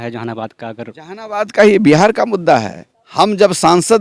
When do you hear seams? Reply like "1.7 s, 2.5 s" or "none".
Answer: 2.8 s